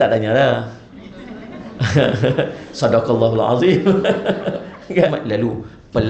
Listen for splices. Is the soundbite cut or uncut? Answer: cut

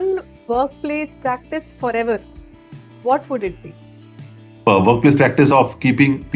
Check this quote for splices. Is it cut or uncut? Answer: uncut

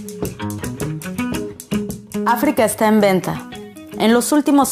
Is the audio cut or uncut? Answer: uncut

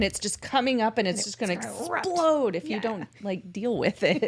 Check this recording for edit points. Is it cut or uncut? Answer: uncut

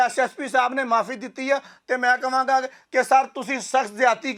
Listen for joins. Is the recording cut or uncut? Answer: uncut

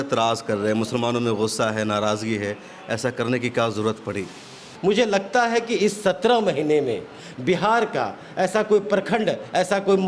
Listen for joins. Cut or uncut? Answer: cut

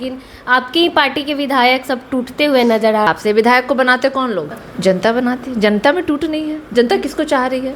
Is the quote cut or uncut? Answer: cut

